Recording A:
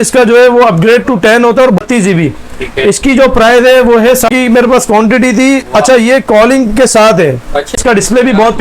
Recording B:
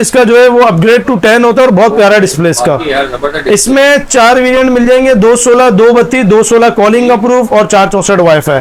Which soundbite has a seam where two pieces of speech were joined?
A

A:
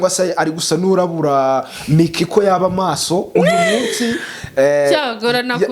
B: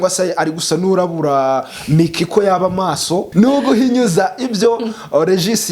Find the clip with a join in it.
B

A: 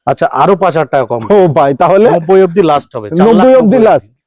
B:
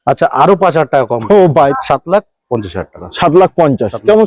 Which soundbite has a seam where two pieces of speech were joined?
B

